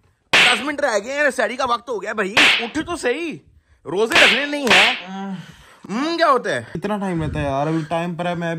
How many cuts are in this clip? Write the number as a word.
zero